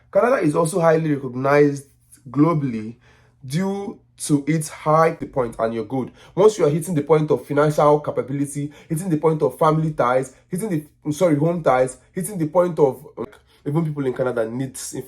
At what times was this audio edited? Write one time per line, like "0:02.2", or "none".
0:05.2
0:13.3